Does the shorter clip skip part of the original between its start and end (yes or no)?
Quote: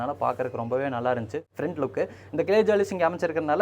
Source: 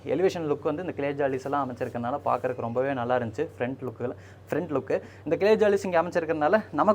yes